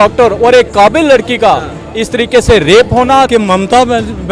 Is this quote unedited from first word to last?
no; 1 cut; at 3.3 s

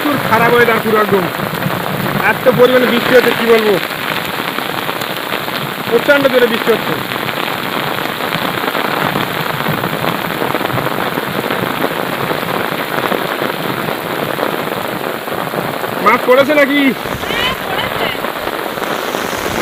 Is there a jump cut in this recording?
no; 0 cuts

